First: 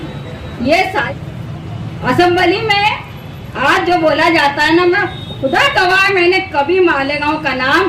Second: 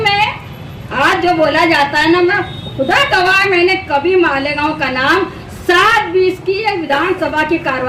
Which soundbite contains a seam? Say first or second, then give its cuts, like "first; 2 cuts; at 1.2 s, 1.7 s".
first; 1 cut; at 1.1 s